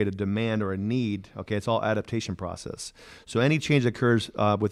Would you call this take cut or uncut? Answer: uncut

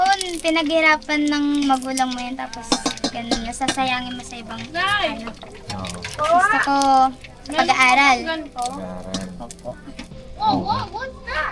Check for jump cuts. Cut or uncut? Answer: cut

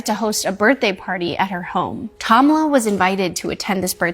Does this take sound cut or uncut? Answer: cut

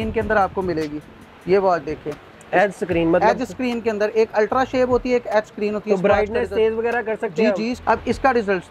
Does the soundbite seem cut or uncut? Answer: cut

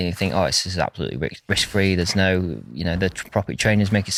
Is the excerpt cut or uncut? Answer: uncut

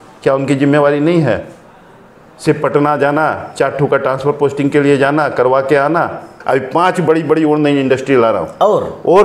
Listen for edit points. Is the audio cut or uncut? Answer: cut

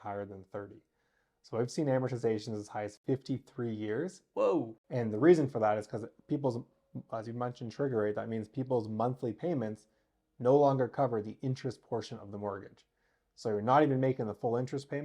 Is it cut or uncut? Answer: cut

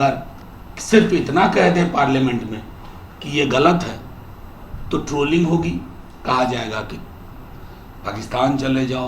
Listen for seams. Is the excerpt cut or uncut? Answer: uncut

